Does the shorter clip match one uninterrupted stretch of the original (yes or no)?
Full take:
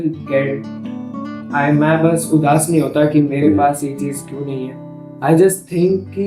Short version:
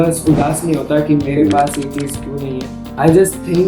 no